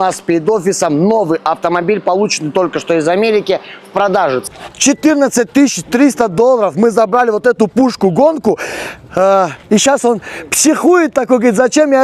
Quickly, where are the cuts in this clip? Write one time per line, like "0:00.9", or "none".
0:04.4